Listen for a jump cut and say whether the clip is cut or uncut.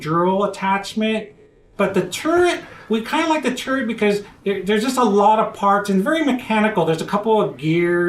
uncut